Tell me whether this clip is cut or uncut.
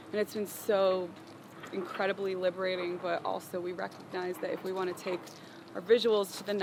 uncut